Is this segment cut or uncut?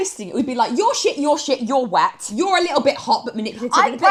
uncut